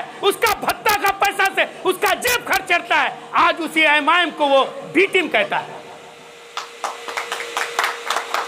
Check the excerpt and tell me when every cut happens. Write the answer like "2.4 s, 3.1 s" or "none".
none